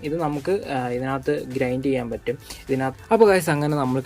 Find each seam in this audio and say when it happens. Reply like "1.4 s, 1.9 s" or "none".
2.9 s

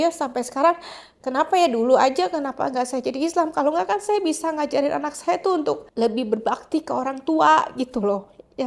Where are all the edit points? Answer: none

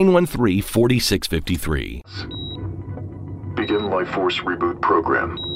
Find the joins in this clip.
2.1 s

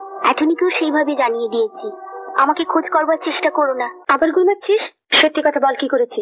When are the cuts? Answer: 3.9 s, 5.0 s

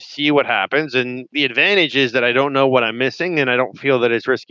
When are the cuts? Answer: 1.3 s

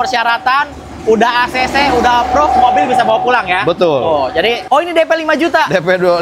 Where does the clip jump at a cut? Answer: 4.6 s

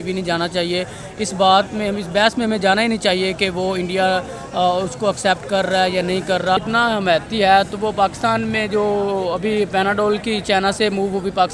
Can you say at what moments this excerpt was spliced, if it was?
6.7 s

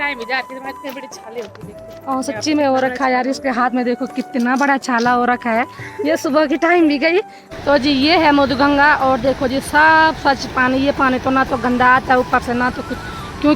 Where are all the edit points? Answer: 7.4 s

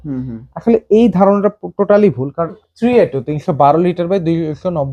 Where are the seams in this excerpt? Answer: 2.6 s

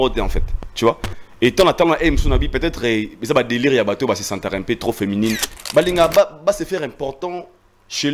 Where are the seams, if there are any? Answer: 5.5 s

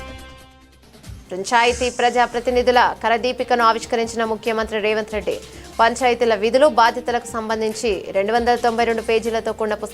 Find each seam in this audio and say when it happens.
1.2 s

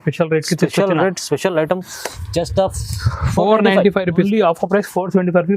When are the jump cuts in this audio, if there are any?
4.2 s

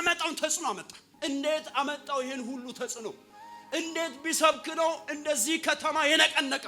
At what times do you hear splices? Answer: 1.1 s

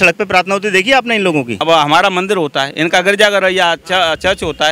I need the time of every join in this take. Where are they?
1.6 s

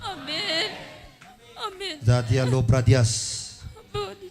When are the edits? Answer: none

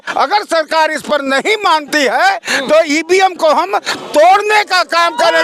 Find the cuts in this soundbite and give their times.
none

